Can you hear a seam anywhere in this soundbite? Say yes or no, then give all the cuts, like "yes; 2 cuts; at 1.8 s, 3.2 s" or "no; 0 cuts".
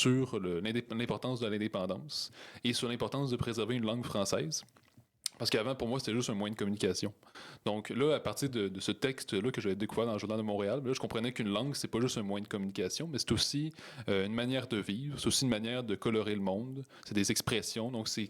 no; 0 cuts